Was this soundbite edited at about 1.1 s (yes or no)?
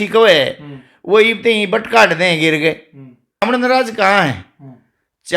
no